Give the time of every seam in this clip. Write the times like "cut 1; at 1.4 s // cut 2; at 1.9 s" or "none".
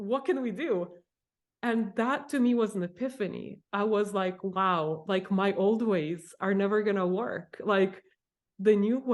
none